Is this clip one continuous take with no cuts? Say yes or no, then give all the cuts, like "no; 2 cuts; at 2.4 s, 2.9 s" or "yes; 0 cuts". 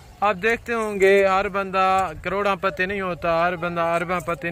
yes; 0 cuts